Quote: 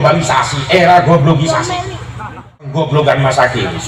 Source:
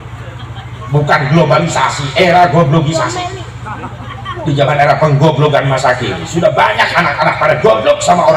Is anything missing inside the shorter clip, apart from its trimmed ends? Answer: yes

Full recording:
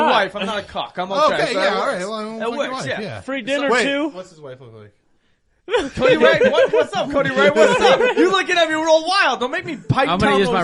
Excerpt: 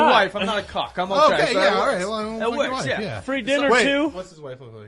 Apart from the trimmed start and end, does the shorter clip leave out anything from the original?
no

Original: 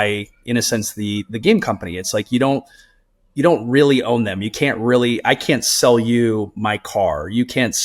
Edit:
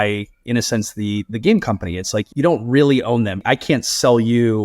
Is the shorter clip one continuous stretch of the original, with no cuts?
no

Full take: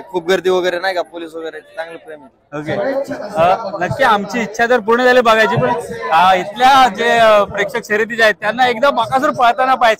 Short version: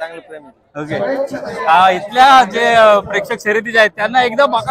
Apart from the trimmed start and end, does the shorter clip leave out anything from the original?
yes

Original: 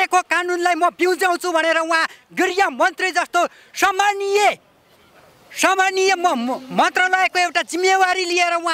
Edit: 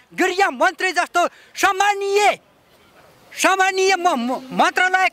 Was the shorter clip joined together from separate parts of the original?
no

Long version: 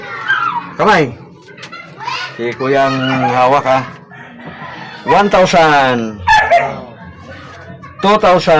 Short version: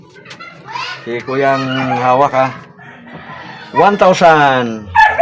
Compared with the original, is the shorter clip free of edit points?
yes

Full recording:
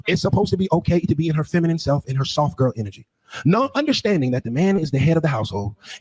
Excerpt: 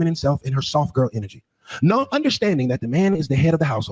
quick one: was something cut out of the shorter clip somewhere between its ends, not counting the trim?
no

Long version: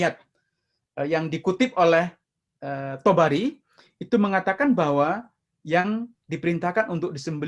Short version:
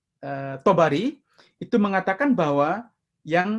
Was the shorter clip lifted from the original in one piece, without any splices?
yes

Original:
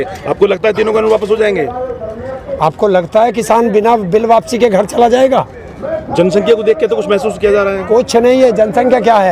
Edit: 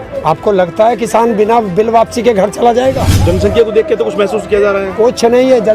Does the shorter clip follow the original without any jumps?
no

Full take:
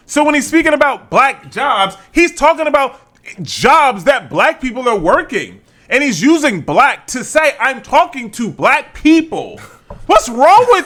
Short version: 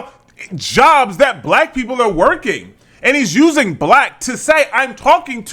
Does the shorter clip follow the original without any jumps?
yes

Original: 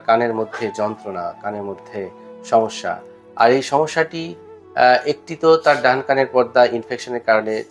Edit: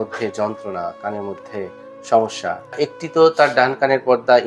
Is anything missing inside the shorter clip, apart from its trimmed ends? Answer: yes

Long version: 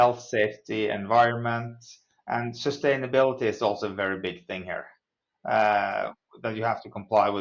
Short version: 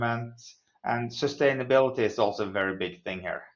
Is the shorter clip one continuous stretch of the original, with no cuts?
yes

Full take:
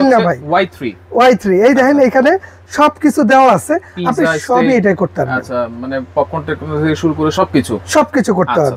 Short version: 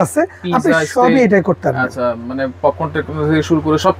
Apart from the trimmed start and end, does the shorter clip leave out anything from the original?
no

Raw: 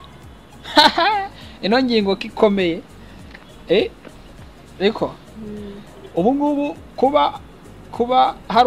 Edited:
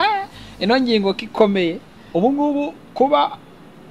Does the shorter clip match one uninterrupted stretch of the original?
no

